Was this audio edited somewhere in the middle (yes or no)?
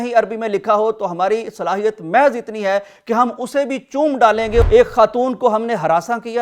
yes